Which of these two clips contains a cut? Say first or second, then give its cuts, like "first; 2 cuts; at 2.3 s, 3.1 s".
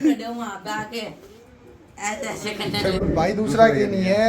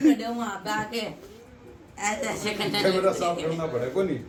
first; 1 cut; at 3.0 s